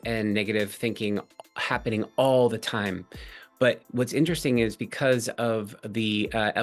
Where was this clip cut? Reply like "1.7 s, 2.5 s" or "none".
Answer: none